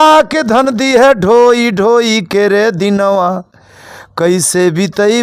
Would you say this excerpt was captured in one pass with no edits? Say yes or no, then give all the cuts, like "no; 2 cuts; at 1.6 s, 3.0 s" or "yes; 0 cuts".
yes; 0 cuts